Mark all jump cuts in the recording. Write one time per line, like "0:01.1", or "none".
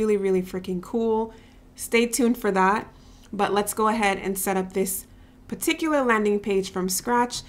none